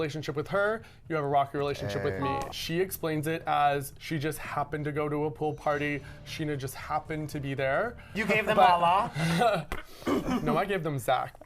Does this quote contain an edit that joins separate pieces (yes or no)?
yes